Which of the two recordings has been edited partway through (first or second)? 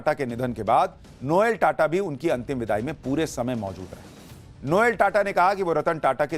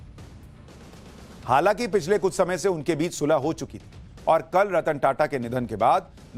first